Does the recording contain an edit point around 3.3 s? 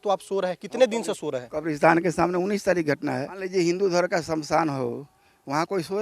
yes; 1 cut; at 3.3 s

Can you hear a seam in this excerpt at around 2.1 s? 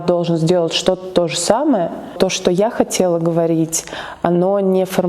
yes; 1 cut; at 2.1 s

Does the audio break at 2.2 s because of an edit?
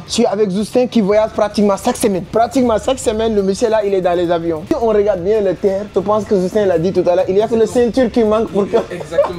yes; 3 cuts; at 2.2 s, 4.7 s, 5.8 s

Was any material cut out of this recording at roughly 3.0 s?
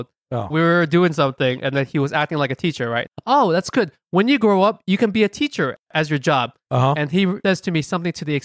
yes; 2 cuts; at 3.0 s, 7.4 s

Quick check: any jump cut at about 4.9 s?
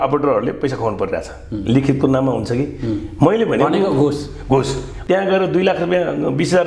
yes; 1 cut; at 4.9 s

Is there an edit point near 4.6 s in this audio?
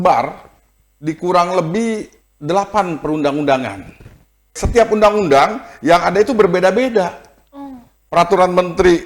yes; 1 cut; at 4.6 s

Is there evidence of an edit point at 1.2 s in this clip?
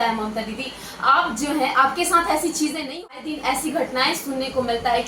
no; 1 cut; at 3.1 s

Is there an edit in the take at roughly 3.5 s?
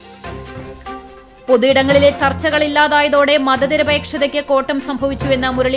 no; 1 cut; at 1.1 s

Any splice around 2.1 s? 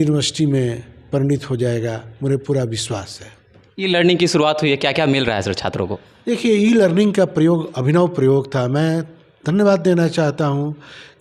no; 0 cuts

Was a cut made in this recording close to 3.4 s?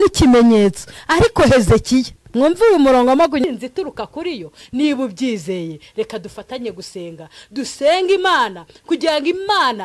yes; 1 cut; at 3.4 s

